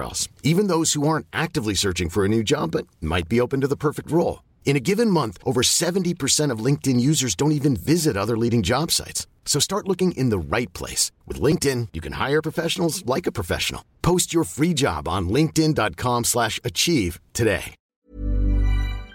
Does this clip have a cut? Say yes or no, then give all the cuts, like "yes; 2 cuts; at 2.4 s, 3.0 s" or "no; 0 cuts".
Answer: yes; 1 cut; at 17.8 s